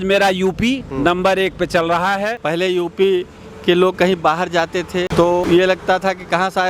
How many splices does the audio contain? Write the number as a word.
two